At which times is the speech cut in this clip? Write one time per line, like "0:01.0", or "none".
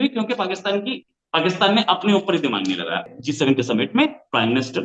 0:03.0